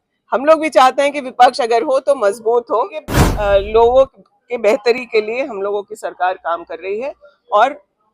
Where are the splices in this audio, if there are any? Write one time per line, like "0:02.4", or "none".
0:03.2